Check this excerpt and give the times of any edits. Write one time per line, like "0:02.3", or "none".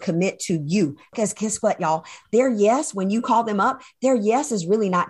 0:01.1